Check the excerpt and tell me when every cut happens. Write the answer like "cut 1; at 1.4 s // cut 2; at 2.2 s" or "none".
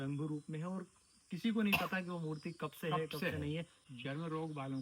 cut 1; at 3.8 s

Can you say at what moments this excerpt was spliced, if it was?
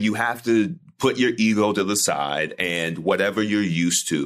none

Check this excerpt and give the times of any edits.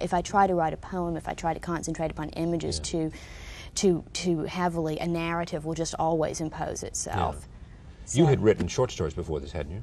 cut 1; at 4.5 s

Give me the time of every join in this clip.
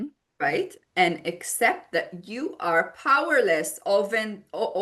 none

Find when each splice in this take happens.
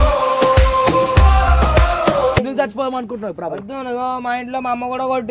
cut 1; at 2.4 s

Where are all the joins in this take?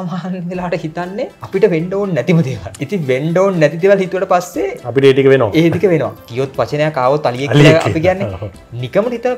cut 1; at 1.4 s // cut 2; at 2.7 s // cut 3; at 6.2 s

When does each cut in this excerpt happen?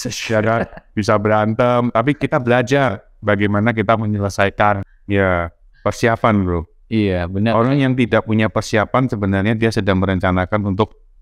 cut 1; at 4.9 s

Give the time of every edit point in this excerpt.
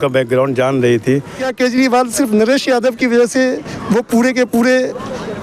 cut 1; at 1.4 s

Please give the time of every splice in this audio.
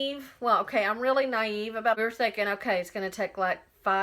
cut 1; at 2.0 s

